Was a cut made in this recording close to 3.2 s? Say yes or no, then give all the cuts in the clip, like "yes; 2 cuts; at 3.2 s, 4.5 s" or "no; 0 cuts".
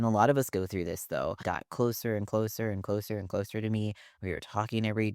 no; 1 cut; at 1.4 s